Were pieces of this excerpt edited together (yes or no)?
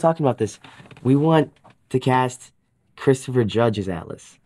no